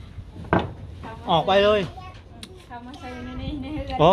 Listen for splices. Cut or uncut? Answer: uncut